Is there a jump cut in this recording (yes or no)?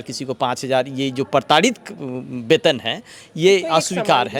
no